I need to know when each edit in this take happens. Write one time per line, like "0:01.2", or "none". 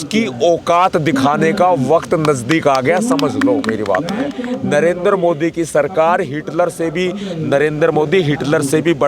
0:04.4